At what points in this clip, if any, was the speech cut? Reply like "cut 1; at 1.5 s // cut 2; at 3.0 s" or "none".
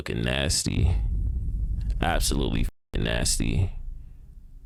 none